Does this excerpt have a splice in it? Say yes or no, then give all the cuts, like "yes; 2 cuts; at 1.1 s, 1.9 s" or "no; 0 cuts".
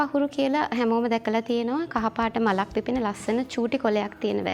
no; 0 cuts